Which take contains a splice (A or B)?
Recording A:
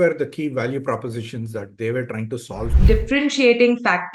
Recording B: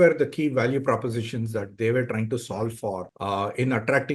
A